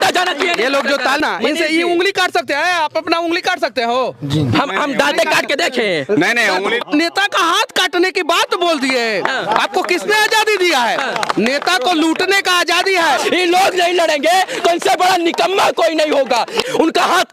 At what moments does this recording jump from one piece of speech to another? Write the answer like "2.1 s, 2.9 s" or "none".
1.2 s, 6.9 s, 13.2 s, 16.6 s